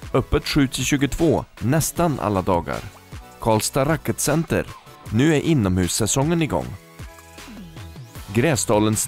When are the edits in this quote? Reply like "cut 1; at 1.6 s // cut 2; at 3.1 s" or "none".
none